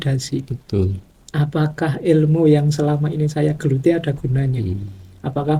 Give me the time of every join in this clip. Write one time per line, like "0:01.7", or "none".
none